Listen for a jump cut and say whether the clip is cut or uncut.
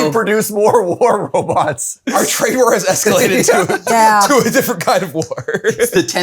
cut